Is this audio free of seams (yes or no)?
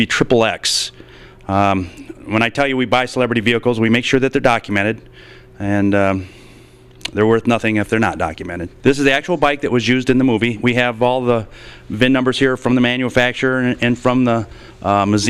no